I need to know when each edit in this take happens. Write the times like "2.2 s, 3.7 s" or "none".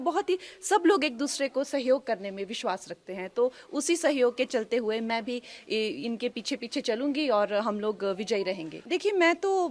none